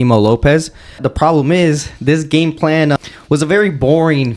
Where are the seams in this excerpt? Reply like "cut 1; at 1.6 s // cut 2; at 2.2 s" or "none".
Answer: cut 1; at 1.0 s // cut 2; at 3.0 s